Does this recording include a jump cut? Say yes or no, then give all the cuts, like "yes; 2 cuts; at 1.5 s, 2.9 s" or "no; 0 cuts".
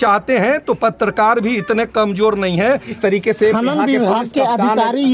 yes; 1 cut; at 2.9 s